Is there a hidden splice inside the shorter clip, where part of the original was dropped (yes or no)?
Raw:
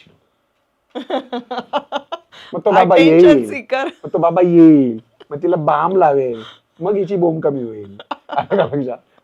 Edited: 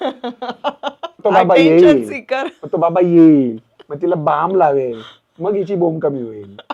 yes